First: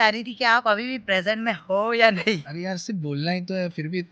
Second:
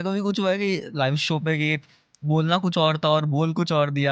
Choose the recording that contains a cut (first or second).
first